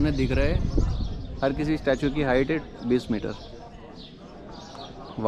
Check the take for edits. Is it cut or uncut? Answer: uncut